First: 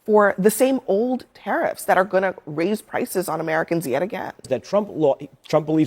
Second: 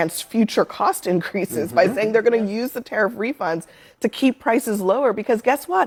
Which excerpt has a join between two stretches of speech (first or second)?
first